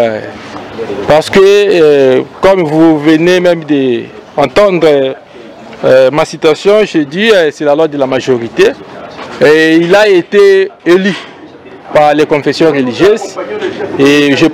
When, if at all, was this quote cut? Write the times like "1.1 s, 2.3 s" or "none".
none